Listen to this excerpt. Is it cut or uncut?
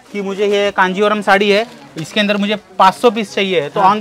uncut